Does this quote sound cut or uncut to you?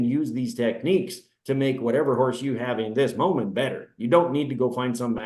uncut